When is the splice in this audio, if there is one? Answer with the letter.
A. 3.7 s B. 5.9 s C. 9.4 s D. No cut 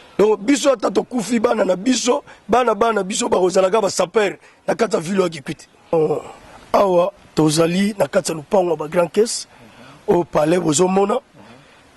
B